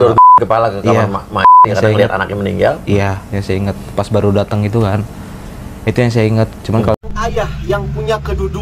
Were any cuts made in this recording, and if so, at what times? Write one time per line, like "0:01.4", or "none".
0:06.9

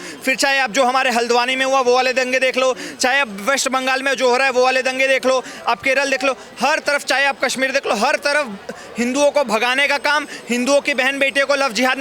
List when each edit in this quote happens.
none

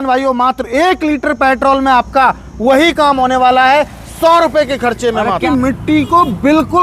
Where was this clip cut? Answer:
0:05.4

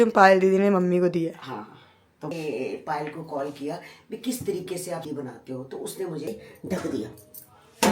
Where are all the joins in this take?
0:02.3
0:05.1
0:06.3

